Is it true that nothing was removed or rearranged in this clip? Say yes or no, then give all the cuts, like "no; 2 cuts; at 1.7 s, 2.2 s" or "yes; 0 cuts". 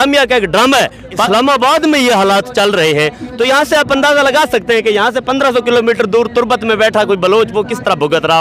no; 1 cut; at 1.3 s